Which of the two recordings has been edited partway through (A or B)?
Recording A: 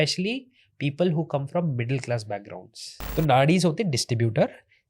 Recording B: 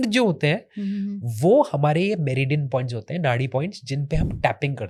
A